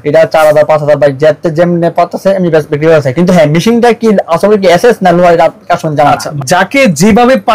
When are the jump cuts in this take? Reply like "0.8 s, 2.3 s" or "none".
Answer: 6.3 s